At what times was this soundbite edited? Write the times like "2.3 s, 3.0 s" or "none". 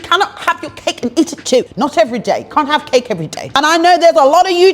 1.7 s, 3.5 s